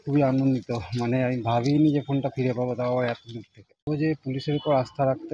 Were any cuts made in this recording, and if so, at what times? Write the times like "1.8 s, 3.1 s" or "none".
3.8 s